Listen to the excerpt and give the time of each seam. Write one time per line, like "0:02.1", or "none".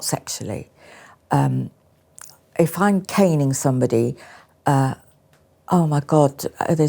none